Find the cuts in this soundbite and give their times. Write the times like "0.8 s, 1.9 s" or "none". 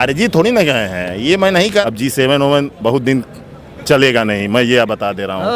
1.8 s